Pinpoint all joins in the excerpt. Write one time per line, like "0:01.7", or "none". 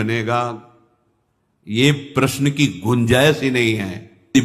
none